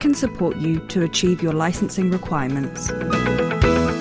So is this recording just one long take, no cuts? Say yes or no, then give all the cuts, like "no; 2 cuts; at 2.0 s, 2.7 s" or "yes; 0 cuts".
no; 1 cut; at 2.9 s